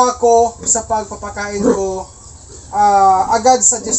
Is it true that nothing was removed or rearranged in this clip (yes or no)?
yes